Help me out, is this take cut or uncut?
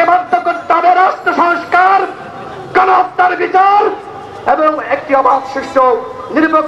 uncut